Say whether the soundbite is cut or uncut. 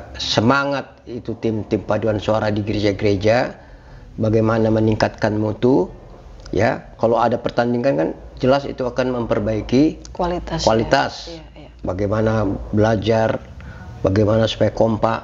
uncut